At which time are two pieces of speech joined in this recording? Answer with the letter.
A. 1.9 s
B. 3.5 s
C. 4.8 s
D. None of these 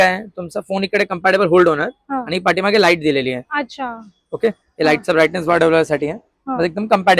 D